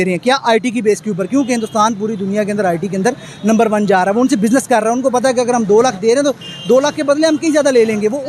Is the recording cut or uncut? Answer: uncut